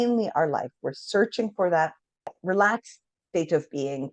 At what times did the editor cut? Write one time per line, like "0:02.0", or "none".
0:02.4